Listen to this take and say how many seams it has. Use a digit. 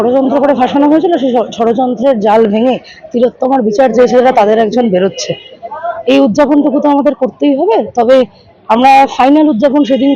0